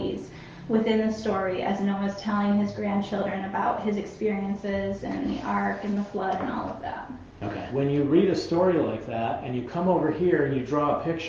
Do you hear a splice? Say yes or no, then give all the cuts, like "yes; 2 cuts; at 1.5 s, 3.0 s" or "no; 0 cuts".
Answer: yes; 1 cut; at 7.6 s